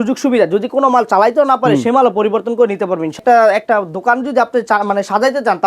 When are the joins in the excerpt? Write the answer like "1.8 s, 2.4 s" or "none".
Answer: 3.1 s